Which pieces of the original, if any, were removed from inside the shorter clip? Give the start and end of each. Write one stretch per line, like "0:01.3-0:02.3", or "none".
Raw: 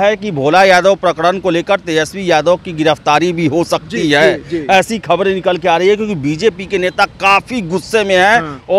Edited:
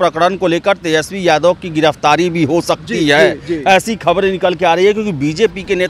none